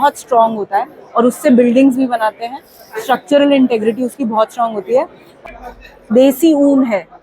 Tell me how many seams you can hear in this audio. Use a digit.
1